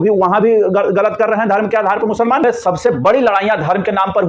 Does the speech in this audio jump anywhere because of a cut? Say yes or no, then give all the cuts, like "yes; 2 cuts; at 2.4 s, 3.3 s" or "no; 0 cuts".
yes; 1 cut; at 2.4 s